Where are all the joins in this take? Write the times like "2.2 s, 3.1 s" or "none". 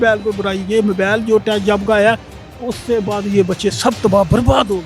none